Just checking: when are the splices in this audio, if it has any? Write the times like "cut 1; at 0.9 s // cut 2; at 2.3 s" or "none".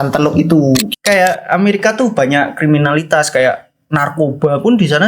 cut 1; at 0.9 s